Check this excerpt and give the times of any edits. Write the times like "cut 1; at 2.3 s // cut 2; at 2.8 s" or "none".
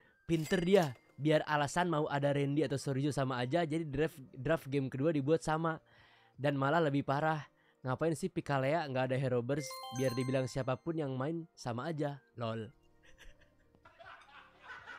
none